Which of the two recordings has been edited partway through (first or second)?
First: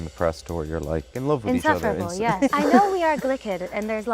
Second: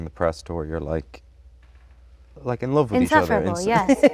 first